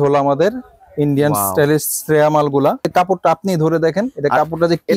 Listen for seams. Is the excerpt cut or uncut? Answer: cut